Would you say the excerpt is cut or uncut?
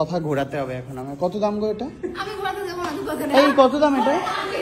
uncut